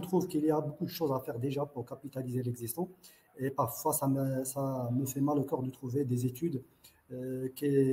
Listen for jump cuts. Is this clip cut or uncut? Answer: uncut